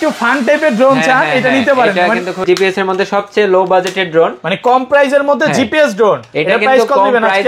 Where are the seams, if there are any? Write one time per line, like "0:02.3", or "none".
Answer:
0:02.4